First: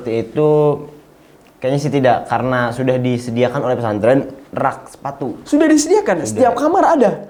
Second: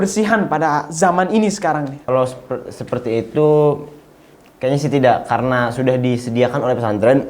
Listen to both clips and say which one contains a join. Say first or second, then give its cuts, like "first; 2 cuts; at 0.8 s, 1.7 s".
second; 1 cut; at 2.0 s